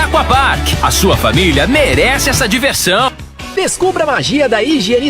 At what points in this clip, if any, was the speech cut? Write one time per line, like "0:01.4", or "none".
0:03.3